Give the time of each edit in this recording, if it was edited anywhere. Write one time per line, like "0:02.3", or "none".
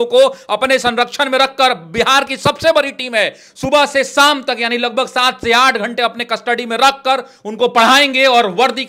none